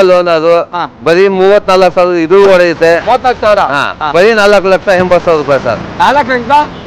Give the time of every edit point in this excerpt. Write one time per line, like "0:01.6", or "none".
0:04.0

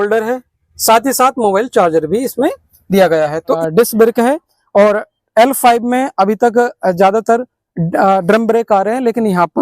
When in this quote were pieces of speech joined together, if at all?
0:03.6

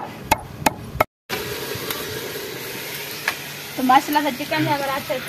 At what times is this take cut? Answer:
none

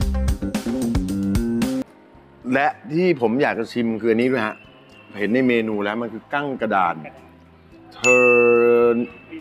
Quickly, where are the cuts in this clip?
0:01.8

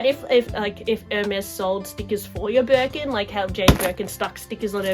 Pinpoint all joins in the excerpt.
none

